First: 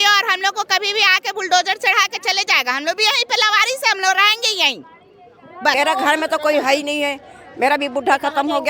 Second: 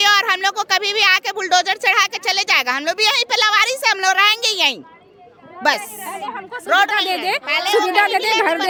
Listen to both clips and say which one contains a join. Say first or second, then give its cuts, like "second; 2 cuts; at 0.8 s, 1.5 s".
first; 1 cut; at 5.7 s